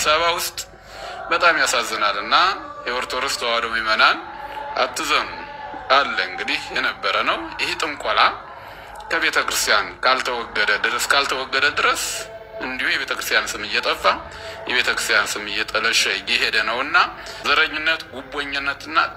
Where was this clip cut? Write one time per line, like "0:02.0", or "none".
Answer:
0:17.4